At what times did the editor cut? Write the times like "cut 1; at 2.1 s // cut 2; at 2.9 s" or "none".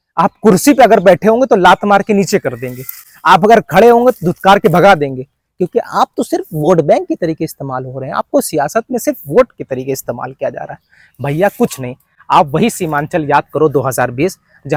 none